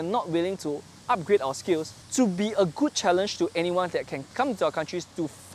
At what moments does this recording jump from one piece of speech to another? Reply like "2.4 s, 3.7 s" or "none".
2.0 s, 4.3 s